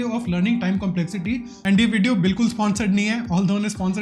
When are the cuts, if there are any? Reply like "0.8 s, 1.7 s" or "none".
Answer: 1.5 s